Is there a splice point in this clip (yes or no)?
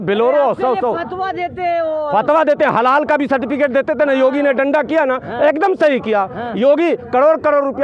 no